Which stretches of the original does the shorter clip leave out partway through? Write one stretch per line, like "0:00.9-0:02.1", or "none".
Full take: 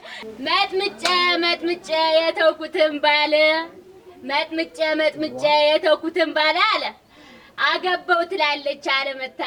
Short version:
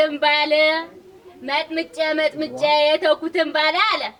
none